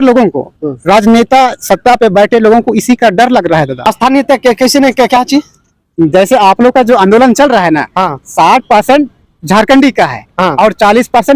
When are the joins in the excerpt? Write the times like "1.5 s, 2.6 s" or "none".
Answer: 3.9 s